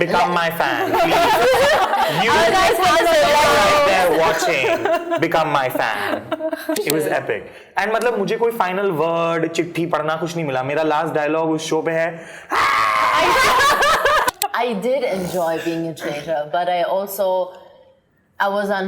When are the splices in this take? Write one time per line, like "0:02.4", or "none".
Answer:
0:06.8
0:14.3